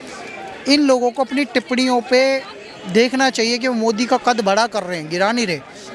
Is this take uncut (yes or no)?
yes